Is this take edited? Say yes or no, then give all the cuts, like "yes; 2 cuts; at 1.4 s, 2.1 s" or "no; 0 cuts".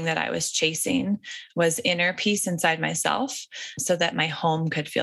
yes; 1 cut; at 3.8 s